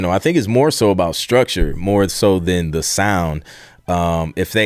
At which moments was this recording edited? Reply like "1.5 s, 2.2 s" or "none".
none